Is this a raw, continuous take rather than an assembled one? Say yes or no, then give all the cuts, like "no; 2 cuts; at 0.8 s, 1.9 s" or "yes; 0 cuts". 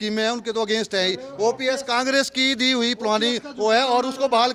yes; 0 cuts